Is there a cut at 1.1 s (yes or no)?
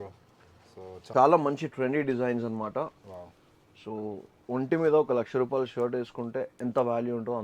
yes